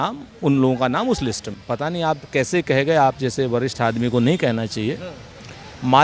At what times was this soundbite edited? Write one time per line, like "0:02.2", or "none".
0:01.5